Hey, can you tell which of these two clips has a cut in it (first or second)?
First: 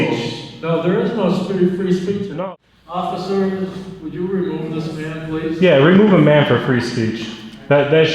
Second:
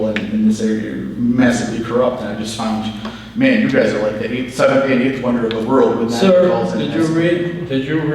first